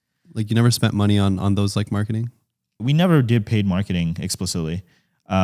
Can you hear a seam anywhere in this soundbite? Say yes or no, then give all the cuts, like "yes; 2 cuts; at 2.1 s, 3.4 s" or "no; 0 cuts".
yes; 1 cut; at 2.9 s